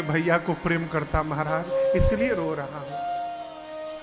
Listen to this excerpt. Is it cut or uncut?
uncut